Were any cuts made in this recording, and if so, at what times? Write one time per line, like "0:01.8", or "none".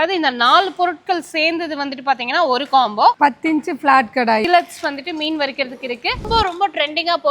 0:03.2
0:04.4
0:06.2